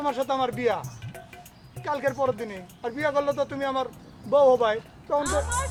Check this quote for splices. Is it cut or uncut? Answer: uncut